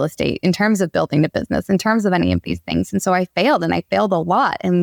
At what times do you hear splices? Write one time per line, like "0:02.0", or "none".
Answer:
none